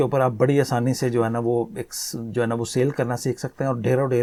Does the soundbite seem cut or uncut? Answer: uncut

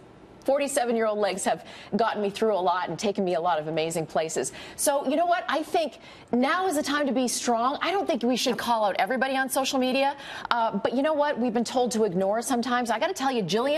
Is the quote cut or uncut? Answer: cut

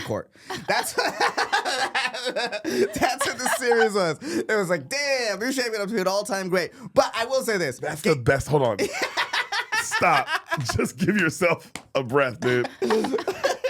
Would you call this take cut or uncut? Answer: cut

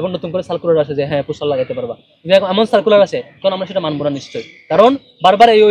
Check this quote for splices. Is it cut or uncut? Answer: uncut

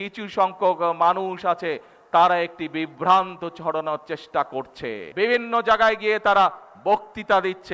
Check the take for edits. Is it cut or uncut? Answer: cut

